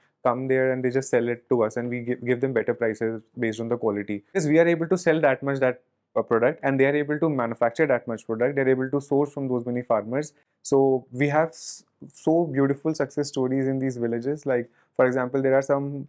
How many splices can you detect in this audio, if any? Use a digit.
2